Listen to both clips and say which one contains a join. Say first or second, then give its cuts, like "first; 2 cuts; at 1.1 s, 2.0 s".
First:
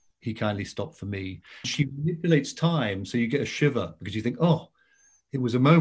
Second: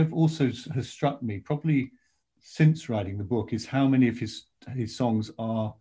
first; 1 cut; at 1.7 s